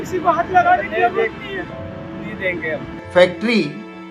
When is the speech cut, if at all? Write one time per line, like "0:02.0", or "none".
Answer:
0:03.0